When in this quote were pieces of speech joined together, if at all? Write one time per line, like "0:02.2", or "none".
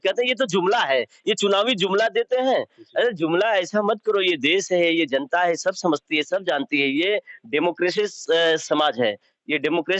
none